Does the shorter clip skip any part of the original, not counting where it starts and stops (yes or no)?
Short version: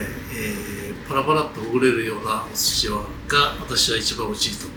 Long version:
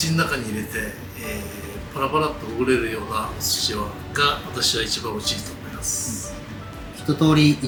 no